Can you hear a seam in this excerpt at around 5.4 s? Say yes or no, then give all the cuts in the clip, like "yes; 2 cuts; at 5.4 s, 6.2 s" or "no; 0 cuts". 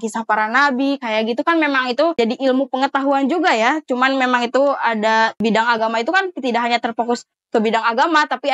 yes; 2 cuts; at 2.2 s, 5.4 s